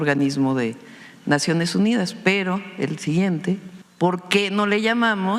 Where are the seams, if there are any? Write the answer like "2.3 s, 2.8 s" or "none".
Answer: 3.8 s